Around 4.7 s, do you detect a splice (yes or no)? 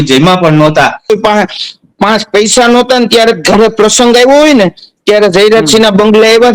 no